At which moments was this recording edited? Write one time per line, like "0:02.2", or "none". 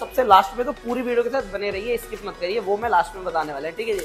none